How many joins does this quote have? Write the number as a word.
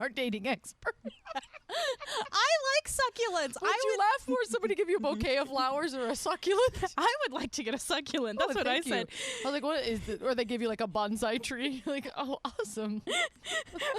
zero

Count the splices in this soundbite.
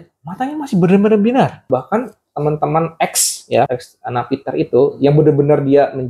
two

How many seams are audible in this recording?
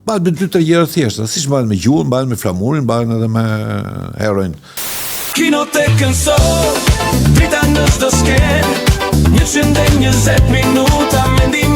one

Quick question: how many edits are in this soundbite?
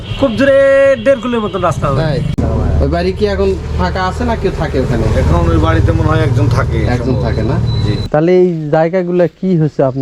two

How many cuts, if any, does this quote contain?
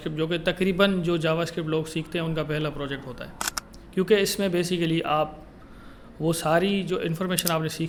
zero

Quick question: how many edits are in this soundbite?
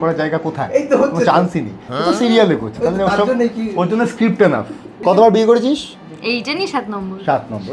one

